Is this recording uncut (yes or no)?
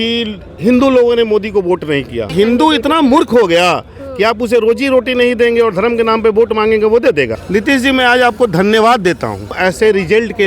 no